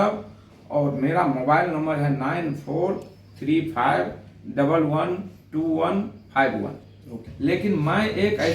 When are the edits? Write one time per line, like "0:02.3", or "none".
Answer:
0:07.2